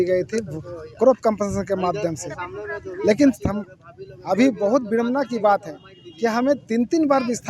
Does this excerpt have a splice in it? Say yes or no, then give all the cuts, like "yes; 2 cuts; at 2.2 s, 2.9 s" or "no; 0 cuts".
no; 0 cuts